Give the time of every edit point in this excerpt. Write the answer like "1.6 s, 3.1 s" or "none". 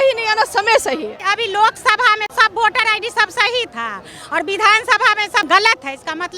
1.3 s, 2.3 s, 5.4 s